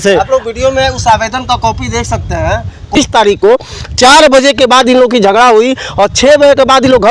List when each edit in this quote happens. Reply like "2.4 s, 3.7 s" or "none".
3.0 s